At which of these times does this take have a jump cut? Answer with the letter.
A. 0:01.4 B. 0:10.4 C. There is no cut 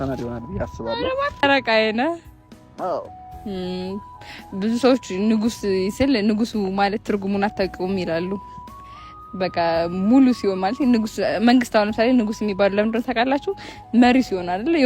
A